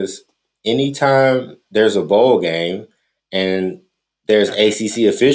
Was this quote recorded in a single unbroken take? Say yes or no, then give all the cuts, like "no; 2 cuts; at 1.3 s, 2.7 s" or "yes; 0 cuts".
no; 1 cut; at 1.6 s